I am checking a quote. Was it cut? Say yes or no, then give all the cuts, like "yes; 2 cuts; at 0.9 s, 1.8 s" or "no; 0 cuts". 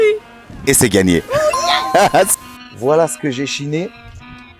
yes; 1 cut; at 2.3 s